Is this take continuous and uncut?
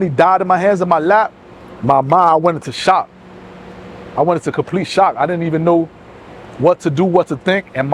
yes; 0 cuts

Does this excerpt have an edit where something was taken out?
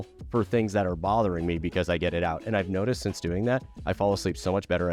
no; 0 cuts

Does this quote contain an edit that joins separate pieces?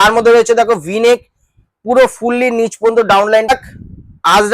yes; 1 cut; at 3.5 s

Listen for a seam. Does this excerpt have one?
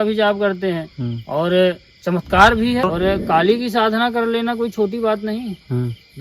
yes; 1 cut; at 2.9 s

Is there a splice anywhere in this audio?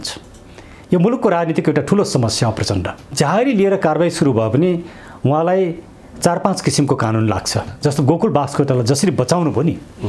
yes; 2 cuts; at 3.0 s, 7.7 s

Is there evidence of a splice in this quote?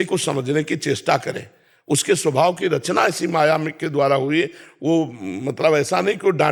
no; 0 cuts

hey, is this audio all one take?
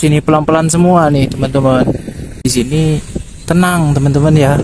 no; 1 cut; at 2.4 s

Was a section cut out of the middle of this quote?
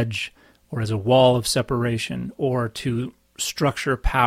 no; 0 cuts

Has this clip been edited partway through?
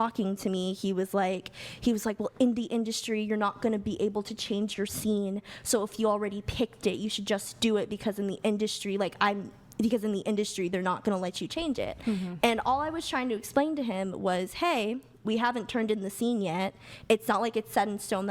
no; 0 cuts

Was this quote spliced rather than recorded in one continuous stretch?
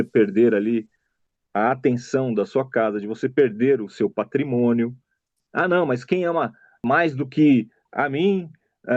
yes; 3 cuts; at 5.4 s, 6.7 s, 7.8 s

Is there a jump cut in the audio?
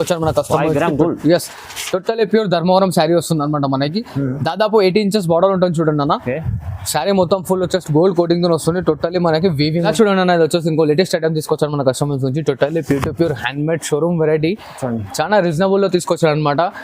yes; 1 cut; at 9.7 s

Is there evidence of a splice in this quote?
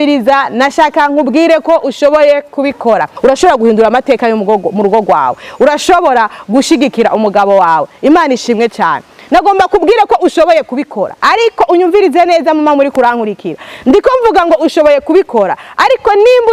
yes; 1 cut; at 3.1 s

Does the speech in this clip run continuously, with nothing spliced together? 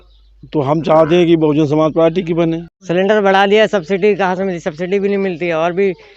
no; 1 cut; at 2.7 s

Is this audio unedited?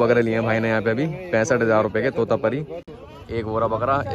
yes; 0 cuts

